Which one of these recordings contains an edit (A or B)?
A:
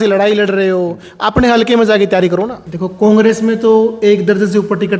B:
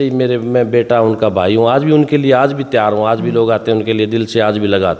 A